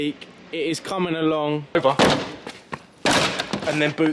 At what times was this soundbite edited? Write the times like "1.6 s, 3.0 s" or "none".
1.8 s